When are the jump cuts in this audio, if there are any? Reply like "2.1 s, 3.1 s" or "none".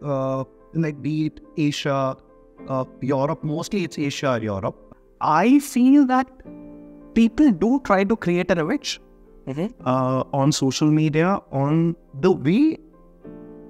4.8 s